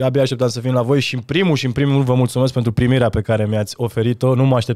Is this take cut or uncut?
uncut